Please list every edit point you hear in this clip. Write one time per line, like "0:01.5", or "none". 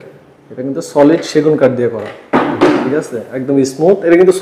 none

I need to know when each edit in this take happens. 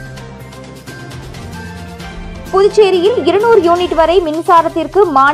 0:02.1

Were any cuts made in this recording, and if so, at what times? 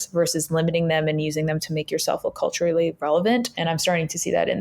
0:03.5

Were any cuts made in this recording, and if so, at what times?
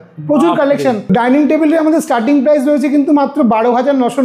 none

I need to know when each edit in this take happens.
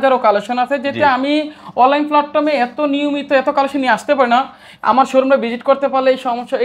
none

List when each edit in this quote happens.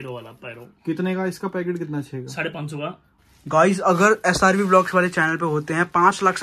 0:03.1

